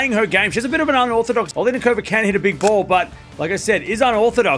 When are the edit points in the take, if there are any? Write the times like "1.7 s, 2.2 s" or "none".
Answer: 1.5 s